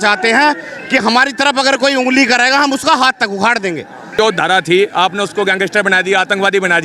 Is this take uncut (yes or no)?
no